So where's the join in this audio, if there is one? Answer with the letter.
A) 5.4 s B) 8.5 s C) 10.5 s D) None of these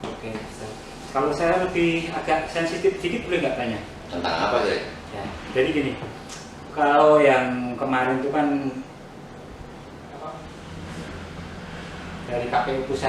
C